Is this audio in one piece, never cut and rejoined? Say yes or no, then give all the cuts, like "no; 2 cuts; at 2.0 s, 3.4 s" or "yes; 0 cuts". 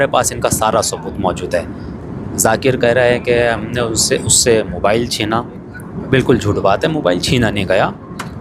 yes; 0 cuts